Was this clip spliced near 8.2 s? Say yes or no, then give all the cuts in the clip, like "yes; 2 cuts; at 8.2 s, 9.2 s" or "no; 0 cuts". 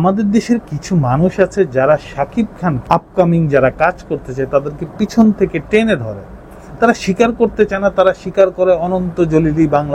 no; 1 cut; at 2.8 s